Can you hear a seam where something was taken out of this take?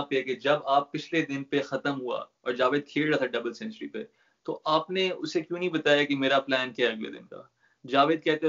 no; 0 cuts

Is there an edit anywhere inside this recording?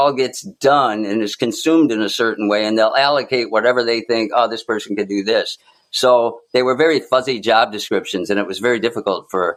no; 0 cuts

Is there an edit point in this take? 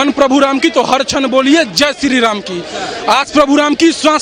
no; 0 cuts

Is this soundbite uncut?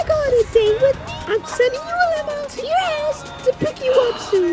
no; 2 cuts; at 1.1 s, 2.5 s

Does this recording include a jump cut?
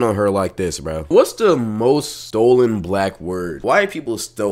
yes; 3 cuts; at 1.1 s, 2.2 s, 3.6 s

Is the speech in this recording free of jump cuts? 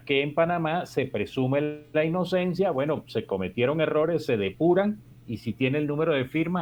yes; 0 cuts

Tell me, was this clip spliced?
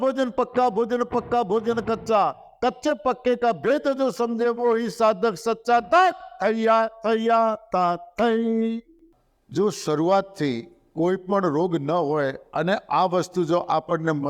yes; 1 cut; at 9.0 s

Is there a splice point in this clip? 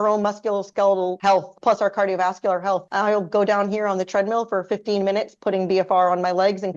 yes; 2 cuts; at 1.2 s, 2.9 s

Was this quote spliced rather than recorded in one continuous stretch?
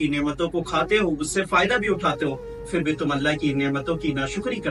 no; 0 cuts

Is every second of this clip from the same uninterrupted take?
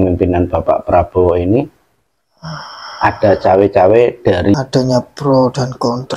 no; 1 cut; at 4.5 s

